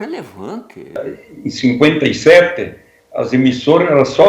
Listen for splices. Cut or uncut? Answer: cut